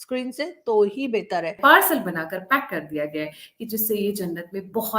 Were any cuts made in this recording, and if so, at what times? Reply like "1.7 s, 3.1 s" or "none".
1.6 s